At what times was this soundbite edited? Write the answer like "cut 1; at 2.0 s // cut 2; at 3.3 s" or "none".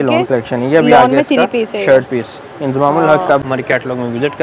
cut 1; at 3.4 s